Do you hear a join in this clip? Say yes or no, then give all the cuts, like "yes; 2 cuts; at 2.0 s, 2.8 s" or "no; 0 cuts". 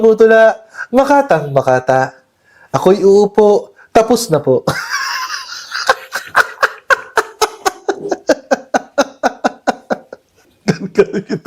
yes; 1 cut; at 10.5 s